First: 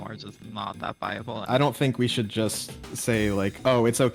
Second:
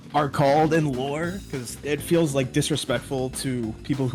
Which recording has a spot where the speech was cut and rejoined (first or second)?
first